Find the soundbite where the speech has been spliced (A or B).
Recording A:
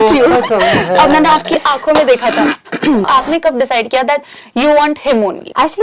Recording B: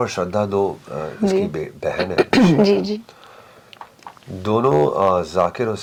A